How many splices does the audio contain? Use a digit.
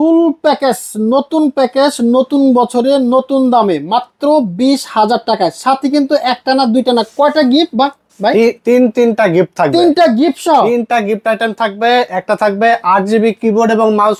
0